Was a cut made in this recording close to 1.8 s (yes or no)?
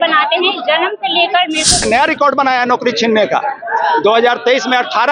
yes